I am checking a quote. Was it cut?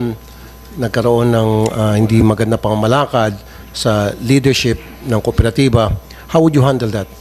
no; 0 cuts

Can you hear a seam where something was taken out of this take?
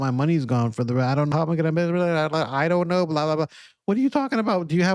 yes; 1 cut; at 1.3 s

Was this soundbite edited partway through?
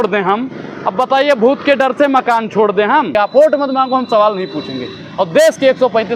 yes; 1 cut; at 3.1 s

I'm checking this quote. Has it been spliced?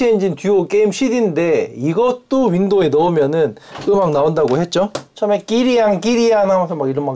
yes; 1 cut; at 5.0 s

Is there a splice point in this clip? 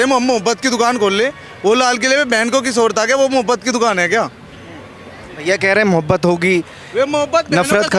no; 0 cuts

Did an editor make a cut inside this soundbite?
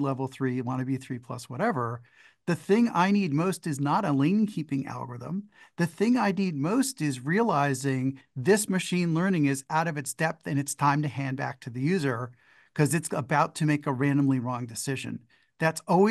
no; 0 cuts

